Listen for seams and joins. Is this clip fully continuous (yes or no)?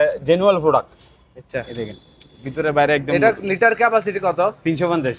yes